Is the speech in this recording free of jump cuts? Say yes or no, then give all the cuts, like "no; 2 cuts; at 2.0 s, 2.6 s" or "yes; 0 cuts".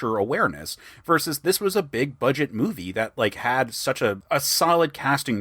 yes; 0 cuts